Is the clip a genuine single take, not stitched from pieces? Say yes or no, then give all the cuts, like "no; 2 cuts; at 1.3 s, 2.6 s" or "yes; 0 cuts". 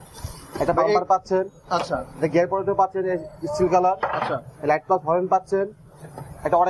yes; 0 cuts